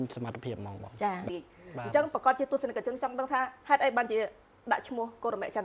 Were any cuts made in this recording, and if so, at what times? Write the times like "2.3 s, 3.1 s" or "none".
1.3 s